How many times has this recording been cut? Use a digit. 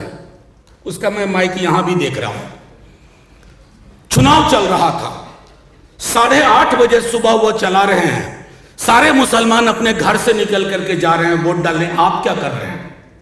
0